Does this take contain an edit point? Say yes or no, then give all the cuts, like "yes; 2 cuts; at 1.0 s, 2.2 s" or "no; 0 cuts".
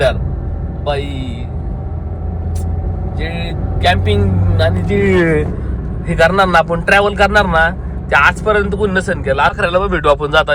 yes; 1 cut; at 9.6 s